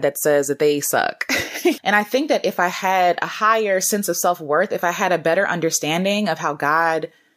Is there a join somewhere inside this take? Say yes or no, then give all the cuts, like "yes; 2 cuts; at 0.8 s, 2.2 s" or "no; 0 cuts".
yes; 1 cut; at 1.8 s